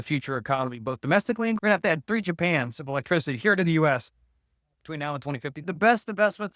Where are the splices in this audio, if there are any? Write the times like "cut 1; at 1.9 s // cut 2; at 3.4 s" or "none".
cut 1; at 1.6 s // cut 2; at 5.6 s